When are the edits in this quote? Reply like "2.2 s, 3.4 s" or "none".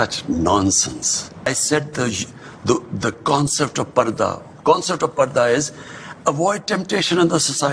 1.5 s